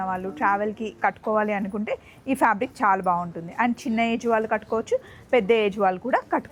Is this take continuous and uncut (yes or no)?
yes